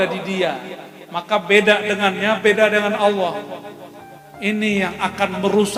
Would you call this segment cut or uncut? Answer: uncut